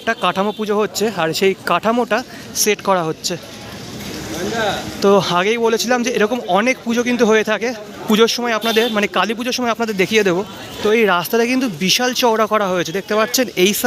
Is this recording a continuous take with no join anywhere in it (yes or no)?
yes